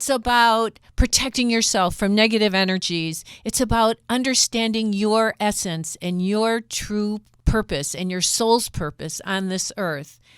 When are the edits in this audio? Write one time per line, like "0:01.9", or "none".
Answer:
0:07.3

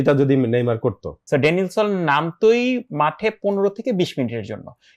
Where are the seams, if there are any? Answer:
0:01.1

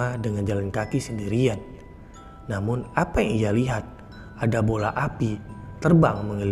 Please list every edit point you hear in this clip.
none

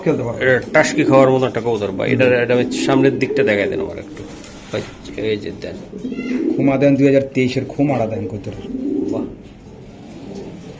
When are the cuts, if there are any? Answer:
none

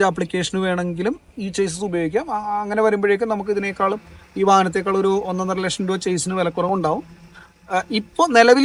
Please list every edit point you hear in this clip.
none

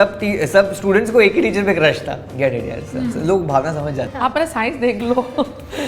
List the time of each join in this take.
0:04.1

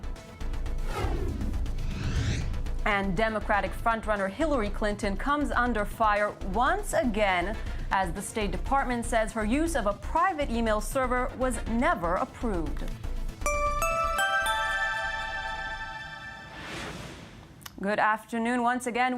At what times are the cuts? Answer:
0:02.7

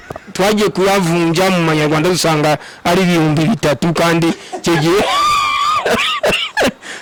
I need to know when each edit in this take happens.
none

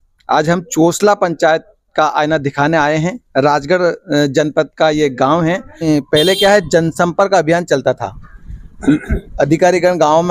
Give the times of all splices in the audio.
0:05.9

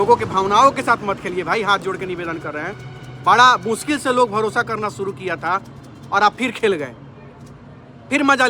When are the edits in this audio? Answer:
none

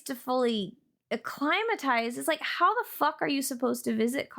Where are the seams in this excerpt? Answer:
none

